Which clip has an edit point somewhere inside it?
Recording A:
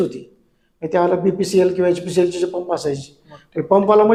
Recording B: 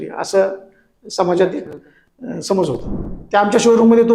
B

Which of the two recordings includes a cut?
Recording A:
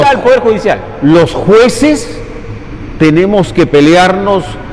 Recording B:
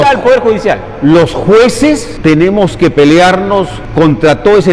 B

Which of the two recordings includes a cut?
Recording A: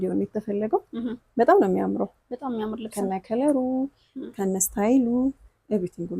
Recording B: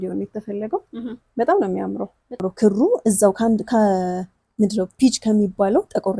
B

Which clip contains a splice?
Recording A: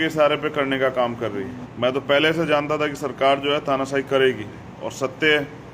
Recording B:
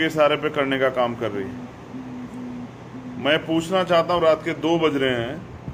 A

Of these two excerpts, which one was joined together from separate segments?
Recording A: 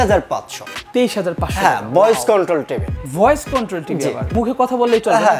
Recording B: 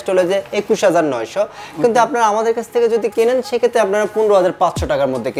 A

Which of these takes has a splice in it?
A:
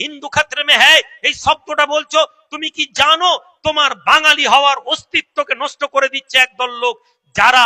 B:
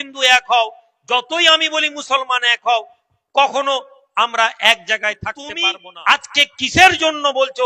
B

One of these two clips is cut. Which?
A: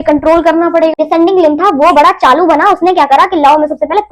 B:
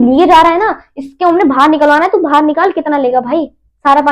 A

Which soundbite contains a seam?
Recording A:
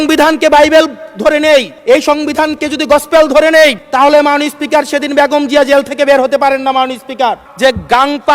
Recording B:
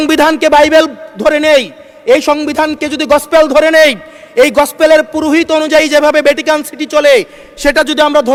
A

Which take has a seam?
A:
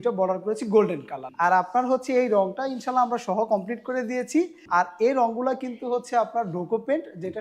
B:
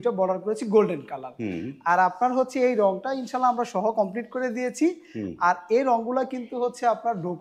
A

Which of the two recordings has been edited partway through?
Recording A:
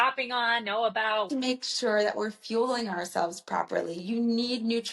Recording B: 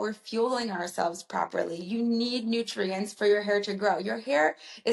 A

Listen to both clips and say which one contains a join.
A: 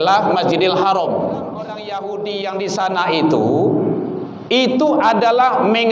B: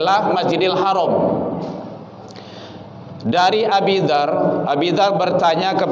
A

